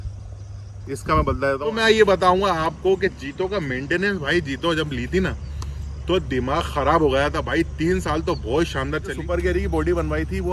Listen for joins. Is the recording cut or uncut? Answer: cut